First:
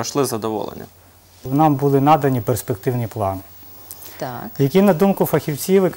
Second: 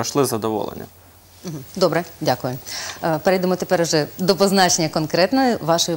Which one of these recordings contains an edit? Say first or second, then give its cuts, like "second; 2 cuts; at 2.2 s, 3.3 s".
first; 1 cut; at 1.4 s